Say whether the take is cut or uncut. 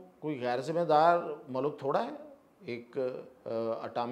uncut